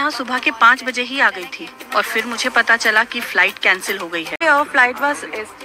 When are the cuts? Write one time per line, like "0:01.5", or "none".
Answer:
0:04.4